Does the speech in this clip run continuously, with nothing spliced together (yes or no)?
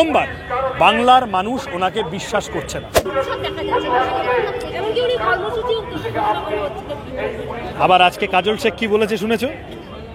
no